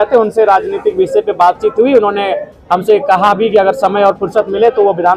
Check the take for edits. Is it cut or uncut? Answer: uncut